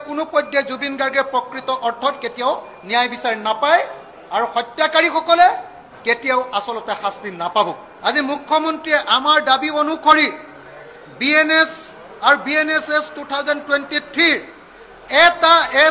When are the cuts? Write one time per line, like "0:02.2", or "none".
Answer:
0:07.9